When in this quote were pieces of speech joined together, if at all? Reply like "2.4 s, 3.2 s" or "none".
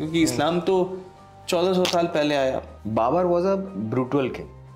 2.7 s